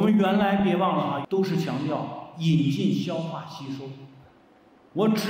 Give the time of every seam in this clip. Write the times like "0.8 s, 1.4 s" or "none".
1.2 s